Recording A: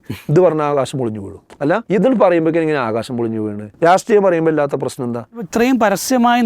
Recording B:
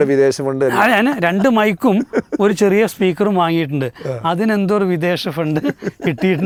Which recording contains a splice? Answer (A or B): A